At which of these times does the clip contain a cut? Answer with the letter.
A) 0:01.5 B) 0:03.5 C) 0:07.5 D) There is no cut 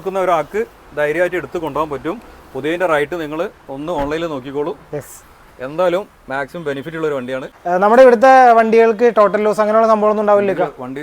C